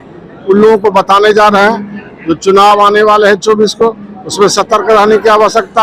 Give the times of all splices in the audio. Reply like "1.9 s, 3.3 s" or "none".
none

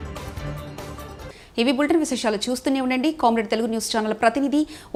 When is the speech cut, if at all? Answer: none

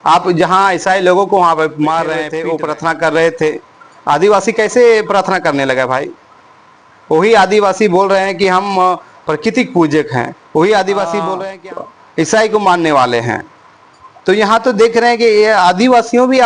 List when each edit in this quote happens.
2.3 s, 11.4 s

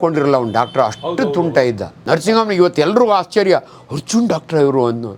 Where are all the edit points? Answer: 1.9 s

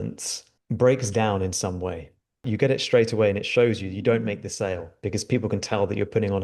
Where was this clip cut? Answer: 2.5 s

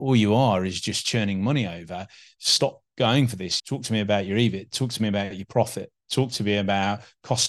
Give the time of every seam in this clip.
none

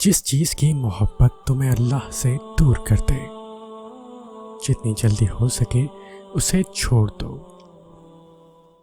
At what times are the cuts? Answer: 3.2 s, 4.6 s, 7.4 s

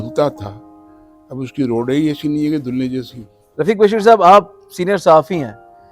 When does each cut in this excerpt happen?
3.4 s

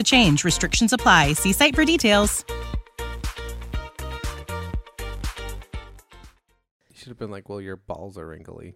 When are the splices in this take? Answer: 6.7 s

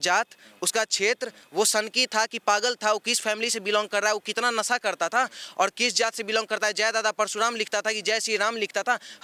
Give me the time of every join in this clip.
none

